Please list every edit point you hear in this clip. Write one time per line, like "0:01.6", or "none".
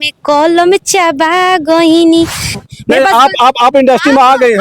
0:02.5